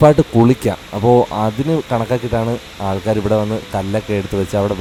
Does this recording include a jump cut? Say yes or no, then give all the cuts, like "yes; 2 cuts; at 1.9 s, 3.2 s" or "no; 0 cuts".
no; 0 cuts